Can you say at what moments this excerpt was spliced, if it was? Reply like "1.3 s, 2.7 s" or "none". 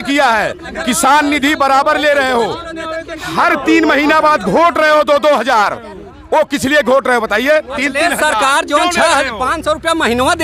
none